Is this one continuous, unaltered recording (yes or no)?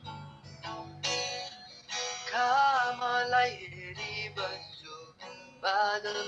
yes